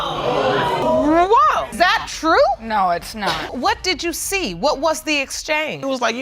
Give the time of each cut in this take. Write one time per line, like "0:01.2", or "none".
0:00.8
0:01.7
0:03.4